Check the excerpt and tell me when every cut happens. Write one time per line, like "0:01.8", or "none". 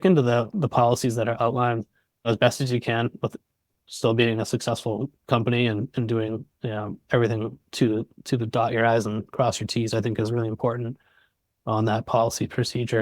0:02.3